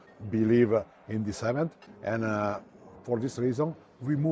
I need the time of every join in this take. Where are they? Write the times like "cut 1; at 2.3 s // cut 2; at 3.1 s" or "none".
cut 1; at 1.8 s

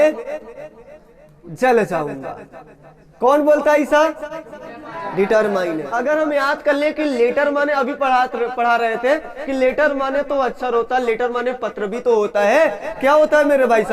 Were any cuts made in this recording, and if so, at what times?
cut 1; at 5.9 s

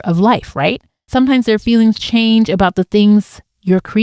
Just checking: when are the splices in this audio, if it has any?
cut 1; at 1.1 s

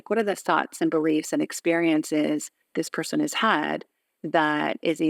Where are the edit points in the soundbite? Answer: cut 1; at 2.6 s

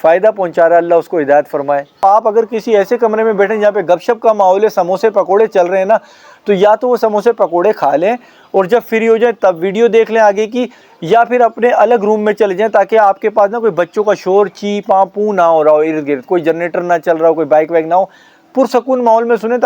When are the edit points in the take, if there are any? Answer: cut 1; at 2.0 s

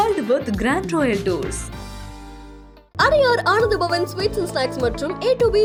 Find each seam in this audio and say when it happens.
none

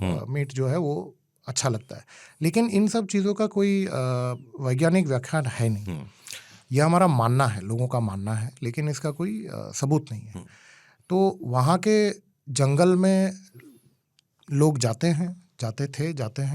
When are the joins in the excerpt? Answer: none

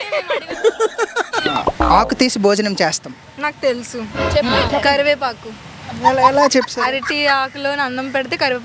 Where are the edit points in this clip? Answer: cut 1; at 1.4 s

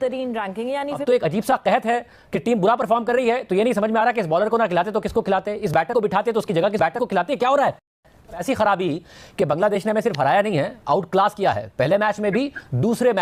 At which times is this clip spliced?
cut 1; at 1.0 s // cut 2; at 8.4 s

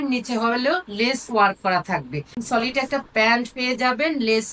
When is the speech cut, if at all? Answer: cut 1; at 2.3 s

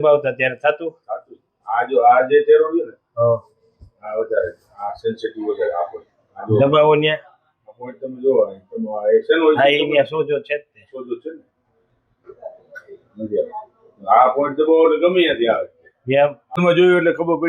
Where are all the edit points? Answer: cut 1; at 16.6 s

